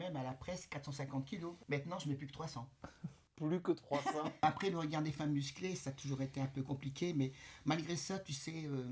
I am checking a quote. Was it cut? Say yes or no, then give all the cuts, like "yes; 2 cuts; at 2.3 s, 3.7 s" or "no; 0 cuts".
yes; 2 cuts; at 1.6 s, 4.4 s